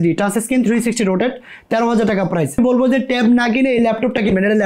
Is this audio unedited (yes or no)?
no